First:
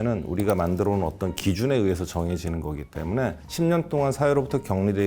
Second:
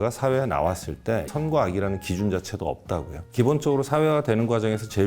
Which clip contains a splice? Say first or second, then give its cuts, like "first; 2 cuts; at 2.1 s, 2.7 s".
second; 1 cut; at 3.3 s